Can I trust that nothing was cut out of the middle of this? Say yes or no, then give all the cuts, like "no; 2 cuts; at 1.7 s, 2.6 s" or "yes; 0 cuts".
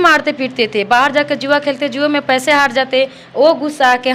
yes; 0 cuts